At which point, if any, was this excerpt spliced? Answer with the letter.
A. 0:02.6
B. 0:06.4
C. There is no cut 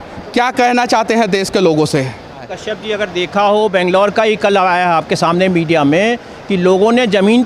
A